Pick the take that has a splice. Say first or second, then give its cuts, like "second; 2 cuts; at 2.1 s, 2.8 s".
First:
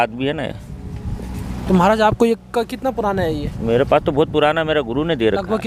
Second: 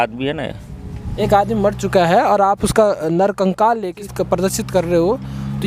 second; 2 cuts; at 1.1 s, 4.0 s